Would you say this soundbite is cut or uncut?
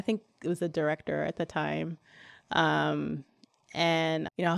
uncut